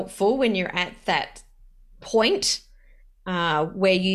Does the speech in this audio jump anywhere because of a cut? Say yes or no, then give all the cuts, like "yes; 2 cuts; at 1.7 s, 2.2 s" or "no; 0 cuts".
no; 0 cuts